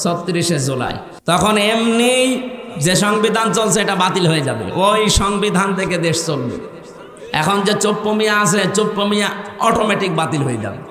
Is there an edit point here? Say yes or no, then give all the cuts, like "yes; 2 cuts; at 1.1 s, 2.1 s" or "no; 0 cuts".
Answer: yes; 1 cut; at 1.1 s